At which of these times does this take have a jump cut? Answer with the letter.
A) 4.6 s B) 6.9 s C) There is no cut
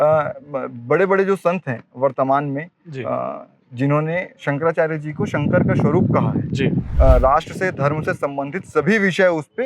B